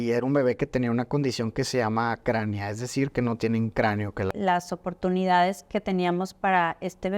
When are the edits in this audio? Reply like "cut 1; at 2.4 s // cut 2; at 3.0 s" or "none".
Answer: cut 1; at 4.3 s